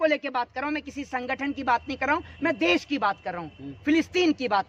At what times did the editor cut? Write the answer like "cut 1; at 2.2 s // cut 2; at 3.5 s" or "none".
none